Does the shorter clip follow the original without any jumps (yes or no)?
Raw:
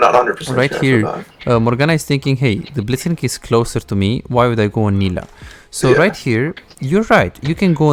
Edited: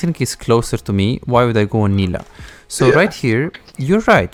yes